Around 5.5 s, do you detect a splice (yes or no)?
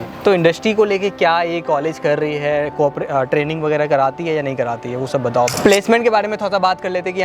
yes